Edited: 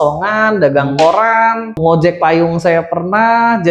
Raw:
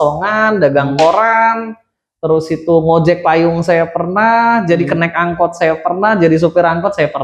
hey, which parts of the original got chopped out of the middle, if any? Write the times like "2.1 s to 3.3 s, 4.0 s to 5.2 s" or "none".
1.8 s to 2.8 s